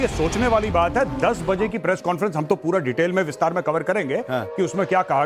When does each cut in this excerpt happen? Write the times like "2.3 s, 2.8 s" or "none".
3.1 s

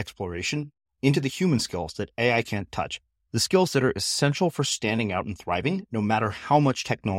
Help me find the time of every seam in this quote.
none

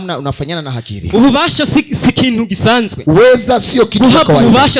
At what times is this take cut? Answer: 1.0 s, 2.9 s

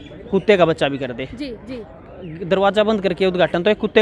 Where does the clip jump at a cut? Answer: none

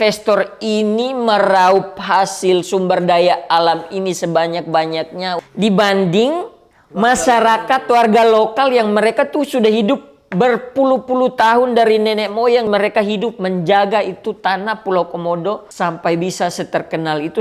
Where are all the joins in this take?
5.4 s, 7.3 s, 12.7 s, 15.7 s

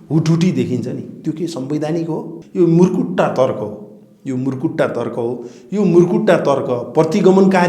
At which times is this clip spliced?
2.4 s

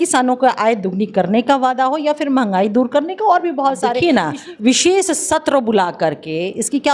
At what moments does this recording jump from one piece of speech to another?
4.0 s

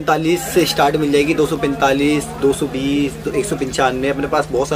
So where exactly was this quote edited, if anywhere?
none

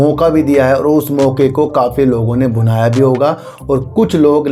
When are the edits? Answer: none

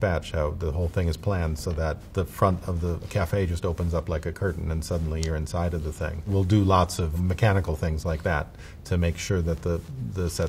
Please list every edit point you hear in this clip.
7.1 s

